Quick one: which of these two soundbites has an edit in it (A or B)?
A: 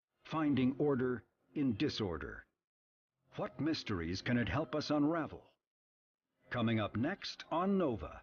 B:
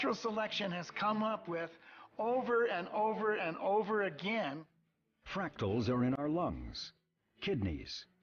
A